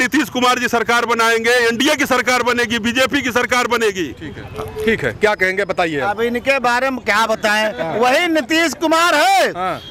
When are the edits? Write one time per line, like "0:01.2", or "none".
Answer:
none